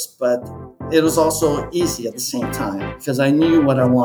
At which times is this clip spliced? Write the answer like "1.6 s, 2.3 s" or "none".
2.9 s